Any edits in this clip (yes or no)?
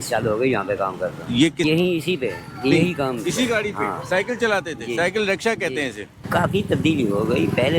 yes